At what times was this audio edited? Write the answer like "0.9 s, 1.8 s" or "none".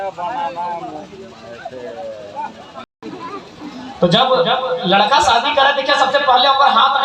2.9 s